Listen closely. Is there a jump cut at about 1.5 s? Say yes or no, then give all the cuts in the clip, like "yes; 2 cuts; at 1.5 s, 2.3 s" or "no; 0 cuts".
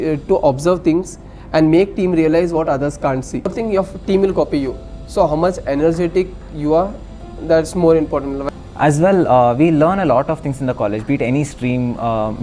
no; 2 cuts; at 3.5 s, 8.4 s